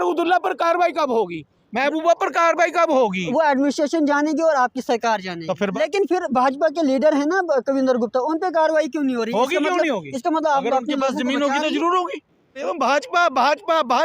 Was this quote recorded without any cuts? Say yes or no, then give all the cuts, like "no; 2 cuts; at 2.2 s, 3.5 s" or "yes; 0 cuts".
no; 2 cuts; at 5.7 s, 12.6 s